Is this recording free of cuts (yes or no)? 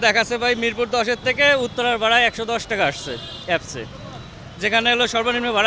yes